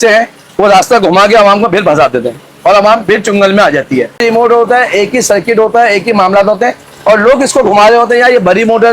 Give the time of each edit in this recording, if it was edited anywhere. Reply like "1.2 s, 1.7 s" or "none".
4.1 s